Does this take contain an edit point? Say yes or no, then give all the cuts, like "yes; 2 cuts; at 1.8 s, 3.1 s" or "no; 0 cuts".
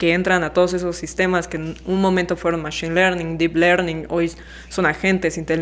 no; 0 cuts